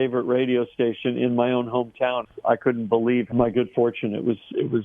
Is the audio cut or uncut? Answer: cut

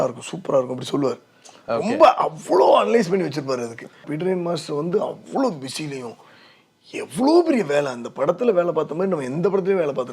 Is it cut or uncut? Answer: cut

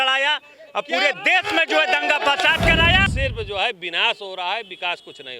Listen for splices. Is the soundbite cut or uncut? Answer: cut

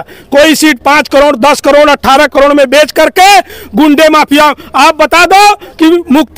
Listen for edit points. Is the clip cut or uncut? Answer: uncut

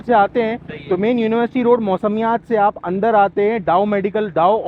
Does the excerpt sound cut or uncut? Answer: uncut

